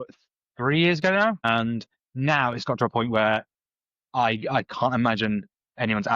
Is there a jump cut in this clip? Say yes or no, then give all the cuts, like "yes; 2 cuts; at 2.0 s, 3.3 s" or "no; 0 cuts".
yes; 1 cut; at 1.4 s